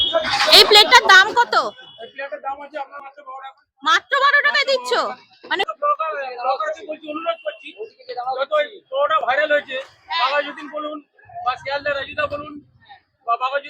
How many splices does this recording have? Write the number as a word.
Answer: two